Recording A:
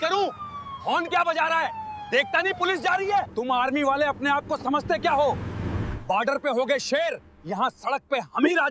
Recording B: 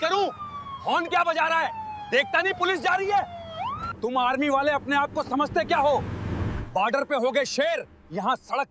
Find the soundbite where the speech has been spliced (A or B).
A